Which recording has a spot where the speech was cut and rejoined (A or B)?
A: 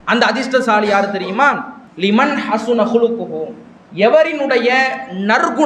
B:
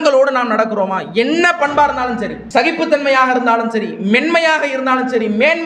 B